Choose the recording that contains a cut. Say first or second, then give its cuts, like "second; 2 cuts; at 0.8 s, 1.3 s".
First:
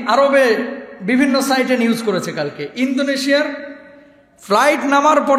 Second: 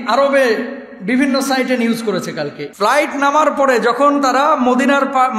second; 1 cut; at 2.6 s